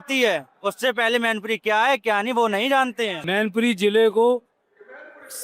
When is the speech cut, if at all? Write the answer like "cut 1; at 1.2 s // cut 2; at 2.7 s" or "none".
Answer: cut 1; at 3.1 s